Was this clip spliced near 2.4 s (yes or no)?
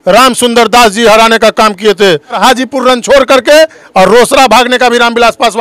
yes